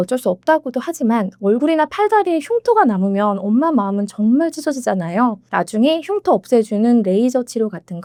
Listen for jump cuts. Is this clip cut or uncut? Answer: uncut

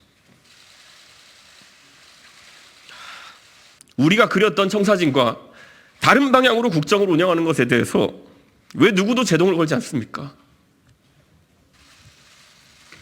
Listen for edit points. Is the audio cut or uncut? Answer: cut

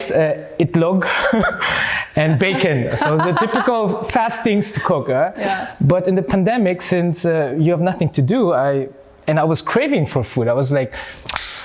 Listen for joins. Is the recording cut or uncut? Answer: uncut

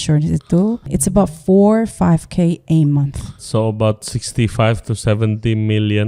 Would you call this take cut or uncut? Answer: cut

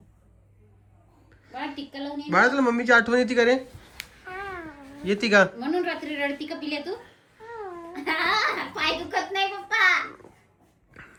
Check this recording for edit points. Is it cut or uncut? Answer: uncut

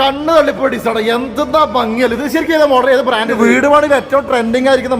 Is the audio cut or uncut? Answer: cut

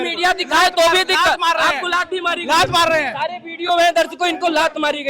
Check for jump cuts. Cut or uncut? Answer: uncut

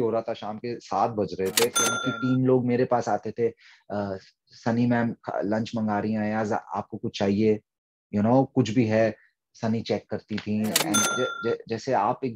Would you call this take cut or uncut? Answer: cut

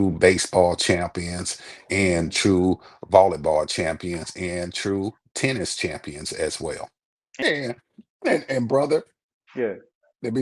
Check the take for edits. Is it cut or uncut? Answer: cut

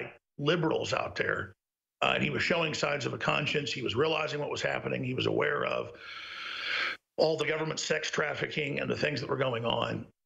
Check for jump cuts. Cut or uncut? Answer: uncut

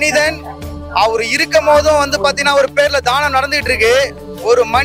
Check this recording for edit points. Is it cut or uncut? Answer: uncut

